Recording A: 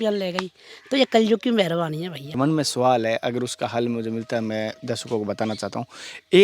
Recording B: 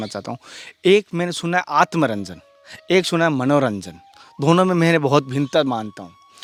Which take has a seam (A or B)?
A